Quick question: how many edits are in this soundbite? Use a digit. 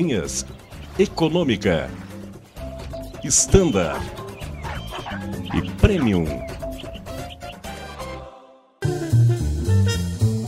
1